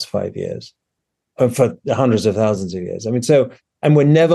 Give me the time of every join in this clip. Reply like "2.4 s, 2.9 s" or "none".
none